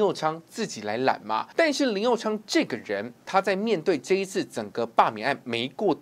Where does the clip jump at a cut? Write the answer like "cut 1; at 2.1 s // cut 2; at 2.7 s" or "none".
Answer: cut 1; at 1.5 s // cut 2; at 3.2 s